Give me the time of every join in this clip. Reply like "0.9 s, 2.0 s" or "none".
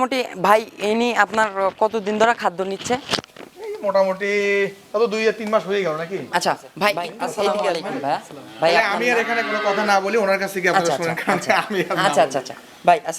7.9 s